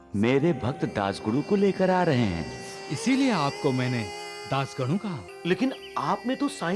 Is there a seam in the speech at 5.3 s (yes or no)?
yes